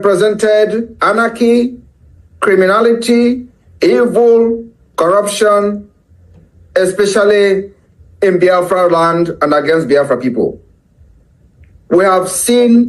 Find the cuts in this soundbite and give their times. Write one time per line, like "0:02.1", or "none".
none